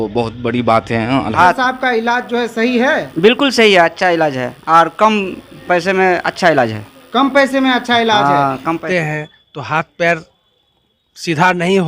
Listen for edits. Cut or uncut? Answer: cut